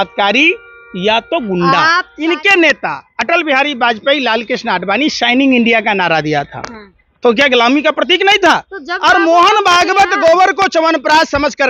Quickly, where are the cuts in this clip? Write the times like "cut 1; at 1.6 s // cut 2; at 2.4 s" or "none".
cut 1; at 2.1 s